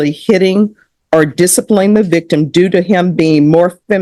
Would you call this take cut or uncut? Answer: uncut